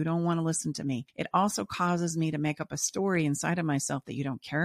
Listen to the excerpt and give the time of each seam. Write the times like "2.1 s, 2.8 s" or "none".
1.1 s